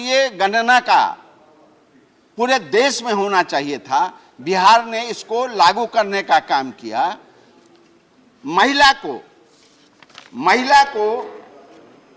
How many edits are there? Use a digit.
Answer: 0